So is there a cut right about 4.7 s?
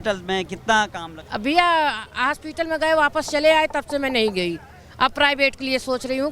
no; 1 cut; at 1.1 s

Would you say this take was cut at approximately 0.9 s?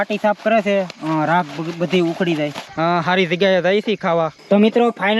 no; 2 cuts; at 2.6 s, 4.4 s

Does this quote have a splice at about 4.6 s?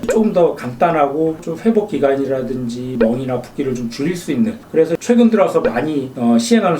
yes; 2 cuts; at 1.4 s, 4.6 s

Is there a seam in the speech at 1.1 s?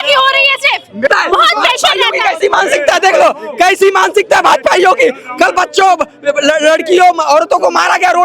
yes; 1 cut; at 1.1 s

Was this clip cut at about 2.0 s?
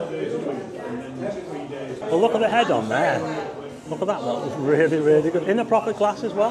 yes; 1 cut; at 2.0 s

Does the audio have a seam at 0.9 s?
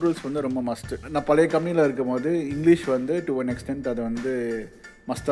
yes; 1 cut; at 0.9 s

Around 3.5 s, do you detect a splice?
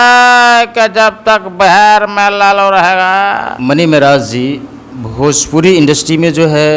yes; 1 cut; at 3.5 s

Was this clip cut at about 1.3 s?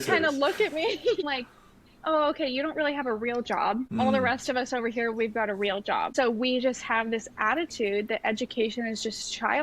yes; 3 cuts; at 1.3 s, 4.1 s, 6.1 s

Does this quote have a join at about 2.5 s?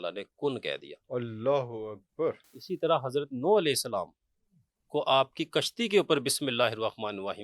yes; 1 cut; at 2.5 s

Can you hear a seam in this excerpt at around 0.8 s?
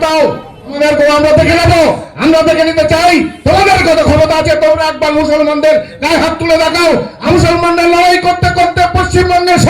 yes; 2 cuts; at 0.8 s, 7.2 s

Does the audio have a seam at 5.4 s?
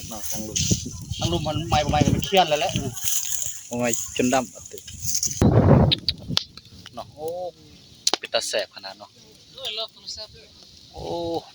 yes; 1 cut; at 5.4 s

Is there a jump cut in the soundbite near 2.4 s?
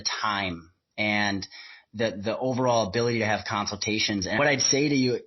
no; 1 cut; at 4.4 s

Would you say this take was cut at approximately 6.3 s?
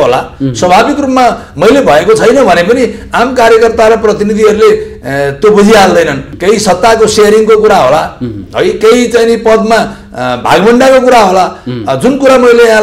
yes; 1 cut; at 6.3 s

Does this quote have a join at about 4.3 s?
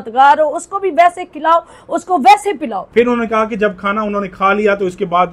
no; 1 cut; at 2.8 s

